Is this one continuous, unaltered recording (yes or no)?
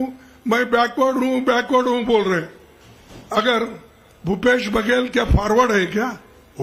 yes